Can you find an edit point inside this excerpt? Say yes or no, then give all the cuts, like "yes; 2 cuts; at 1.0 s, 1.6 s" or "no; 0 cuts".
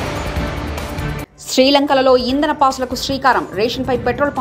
yes; 1 cut; at 1.2 s